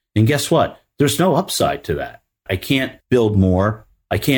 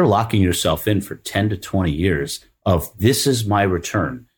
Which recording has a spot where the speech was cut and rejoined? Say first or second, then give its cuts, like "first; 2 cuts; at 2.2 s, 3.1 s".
first; 1 cut; at 2.6 s